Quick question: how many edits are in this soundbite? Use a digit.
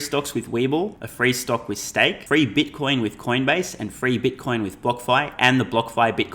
2